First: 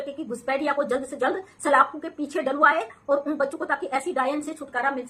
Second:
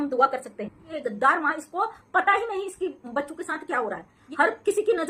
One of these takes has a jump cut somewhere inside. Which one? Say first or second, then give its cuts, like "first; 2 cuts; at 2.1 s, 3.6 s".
second; 2 cuts; at 0.9 s, 4.2 s